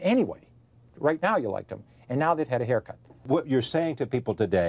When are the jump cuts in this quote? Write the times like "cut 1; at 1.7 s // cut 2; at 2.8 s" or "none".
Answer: cut 1; at 3.2 s